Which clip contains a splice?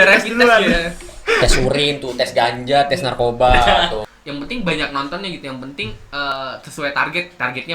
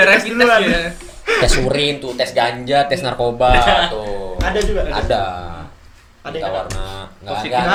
first; 1 cut; at 4.1 s

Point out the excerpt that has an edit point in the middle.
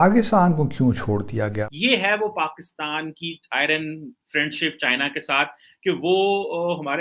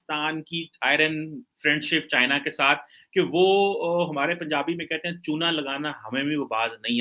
first; 1 cut; at 1.6 s

